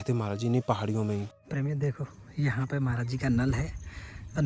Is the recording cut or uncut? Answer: cut